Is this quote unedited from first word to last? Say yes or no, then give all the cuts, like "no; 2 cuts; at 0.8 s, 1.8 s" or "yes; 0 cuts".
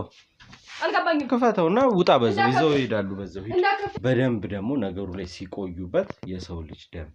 no; 1 cut; at 3.9 s